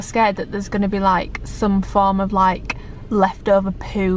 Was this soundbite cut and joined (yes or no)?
no